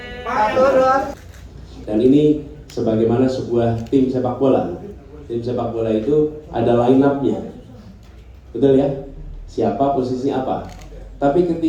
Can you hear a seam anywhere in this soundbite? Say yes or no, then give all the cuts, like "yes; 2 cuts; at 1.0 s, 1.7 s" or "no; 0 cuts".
yes; 1 cut; at 1.1 s